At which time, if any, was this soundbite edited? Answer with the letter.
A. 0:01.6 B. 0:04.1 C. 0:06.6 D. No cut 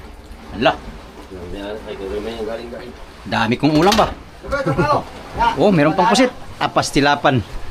D